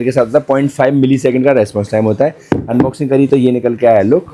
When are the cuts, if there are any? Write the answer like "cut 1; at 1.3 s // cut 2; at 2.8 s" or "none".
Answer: none